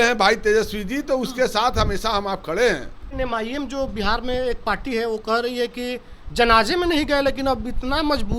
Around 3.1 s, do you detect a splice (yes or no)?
yes